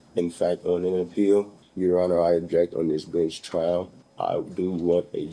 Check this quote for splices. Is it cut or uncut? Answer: cut